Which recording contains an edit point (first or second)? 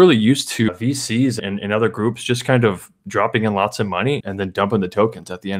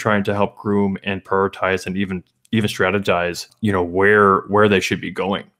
first